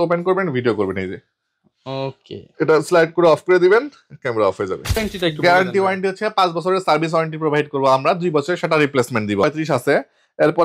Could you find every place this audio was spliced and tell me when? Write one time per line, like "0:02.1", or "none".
0:05.0
0:09.4